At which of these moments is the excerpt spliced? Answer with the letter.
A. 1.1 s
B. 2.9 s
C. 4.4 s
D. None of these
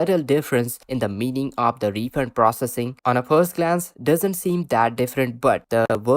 B